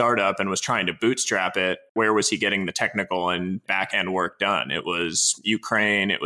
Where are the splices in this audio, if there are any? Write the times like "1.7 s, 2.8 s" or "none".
1.9 s, 3.7 s